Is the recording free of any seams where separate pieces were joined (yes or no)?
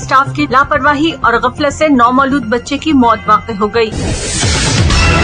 no